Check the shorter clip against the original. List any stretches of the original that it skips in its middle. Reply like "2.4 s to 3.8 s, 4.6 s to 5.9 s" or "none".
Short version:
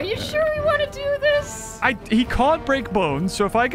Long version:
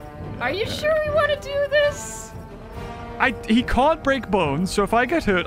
2.1 s to 3.0 s

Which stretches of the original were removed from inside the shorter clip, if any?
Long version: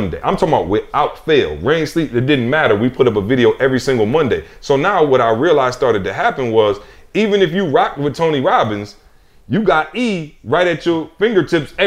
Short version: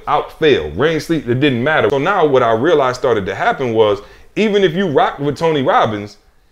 2.8 s to 4.7 s

